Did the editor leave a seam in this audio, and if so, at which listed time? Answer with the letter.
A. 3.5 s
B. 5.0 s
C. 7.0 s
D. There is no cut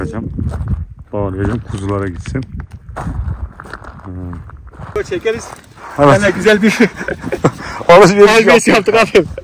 B